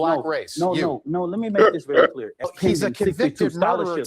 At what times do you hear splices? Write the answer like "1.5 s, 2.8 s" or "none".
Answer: 2.5 s